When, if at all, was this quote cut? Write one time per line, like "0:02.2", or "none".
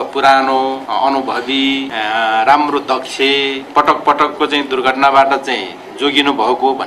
0:00.8
0:01.9
0:03.6